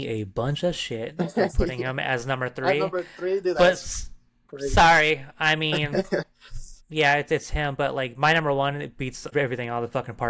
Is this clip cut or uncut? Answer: cut